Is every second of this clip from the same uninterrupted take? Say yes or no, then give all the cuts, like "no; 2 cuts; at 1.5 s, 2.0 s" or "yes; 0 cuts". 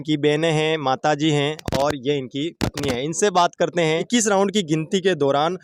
no; 1 cut; at 3.9 s